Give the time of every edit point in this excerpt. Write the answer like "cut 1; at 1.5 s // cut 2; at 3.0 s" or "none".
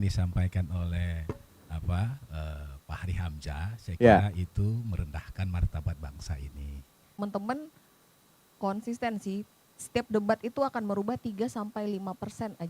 cut 1; at 7.2 s